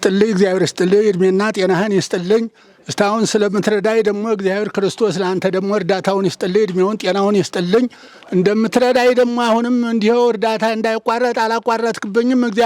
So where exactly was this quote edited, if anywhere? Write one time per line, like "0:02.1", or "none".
none